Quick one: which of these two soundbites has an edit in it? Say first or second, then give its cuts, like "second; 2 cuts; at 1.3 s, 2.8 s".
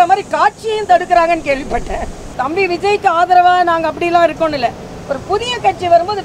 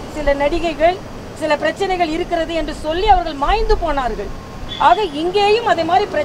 first; 1 cut; at 2.4 s